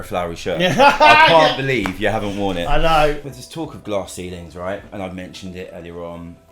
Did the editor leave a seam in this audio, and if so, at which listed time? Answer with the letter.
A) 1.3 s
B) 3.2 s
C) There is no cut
B